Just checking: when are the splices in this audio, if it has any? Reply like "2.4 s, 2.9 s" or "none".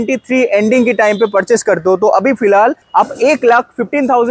2.8 s